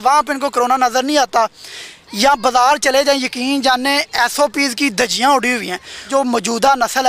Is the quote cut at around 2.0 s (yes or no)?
no